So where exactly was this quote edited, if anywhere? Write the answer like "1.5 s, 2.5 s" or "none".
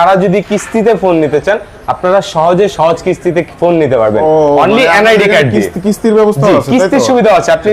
none